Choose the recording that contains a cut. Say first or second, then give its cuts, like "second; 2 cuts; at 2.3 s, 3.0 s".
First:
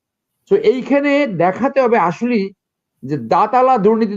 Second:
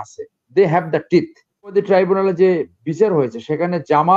second; 1 cut; at 1.7 s